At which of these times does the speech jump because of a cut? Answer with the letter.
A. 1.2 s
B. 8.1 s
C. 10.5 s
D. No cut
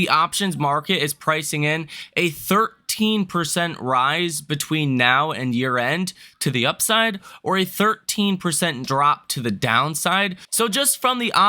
C